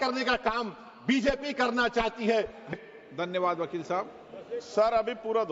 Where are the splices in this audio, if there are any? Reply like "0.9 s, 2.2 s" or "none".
2.7 s